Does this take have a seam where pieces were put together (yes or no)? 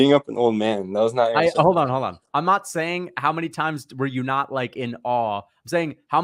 no